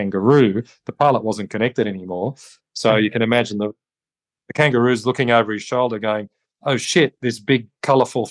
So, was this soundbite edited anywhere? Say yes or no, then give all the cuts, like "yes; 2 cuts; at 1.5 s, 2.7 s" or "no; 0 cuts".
no; 0 cuts